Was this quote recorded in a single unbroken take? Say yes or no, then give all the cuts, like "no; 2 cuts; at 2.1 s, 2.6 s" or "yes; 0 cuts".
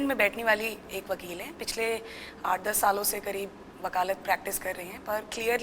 yes; 0 cuts